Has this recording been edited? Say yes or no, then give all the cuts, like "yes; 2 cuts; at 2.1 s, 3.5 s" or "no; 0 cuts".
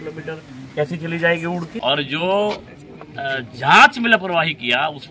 yes; 1 cut; at 1.7 s